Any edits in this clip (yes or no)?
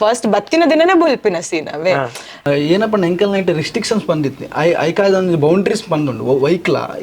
yes